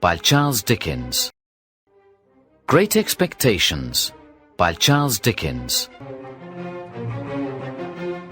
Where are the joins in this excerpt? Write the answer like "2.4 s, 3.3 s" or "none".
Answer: 1.3 s

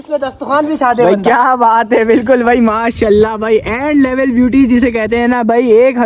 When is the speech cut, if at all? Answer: none

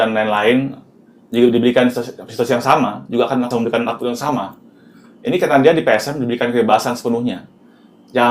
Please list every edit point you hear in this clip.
3.5 s

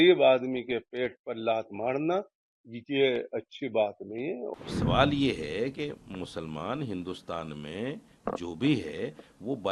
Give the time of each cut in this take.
4.5 s

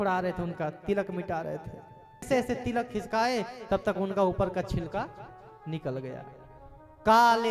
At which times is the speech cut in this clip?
2.3 s

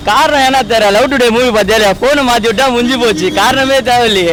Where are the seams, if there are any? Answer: none

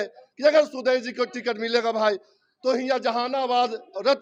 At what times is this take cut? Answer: none

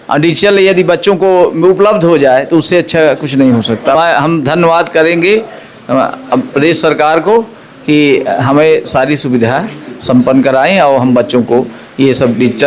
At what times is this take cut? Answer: 4.0 s

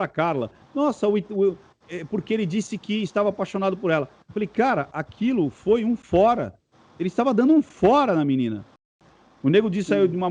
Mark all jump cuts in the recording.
9.1 s

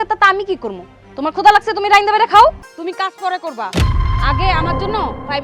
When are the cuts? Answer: 2.7 s

